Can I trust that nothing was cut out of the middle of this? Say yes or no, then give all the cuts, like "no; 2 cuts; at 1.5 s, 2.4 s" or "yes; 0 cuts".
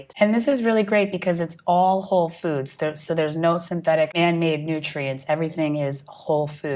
yes; 0 cuts